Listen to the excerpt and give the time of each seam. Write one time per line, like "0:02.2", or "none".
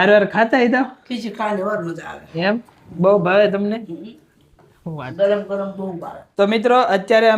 0:06.2